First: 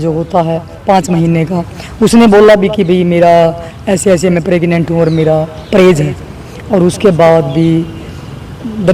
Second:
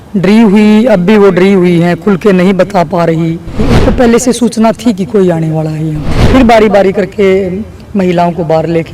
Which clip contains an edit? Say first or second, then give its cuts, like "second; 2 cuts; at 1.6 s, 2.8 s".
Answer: second; 2 cuts; at 3.7 s, 6.1 s